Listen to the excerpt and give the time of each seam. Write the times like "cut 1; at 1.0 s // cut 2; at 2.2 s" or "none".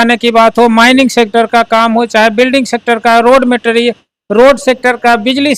none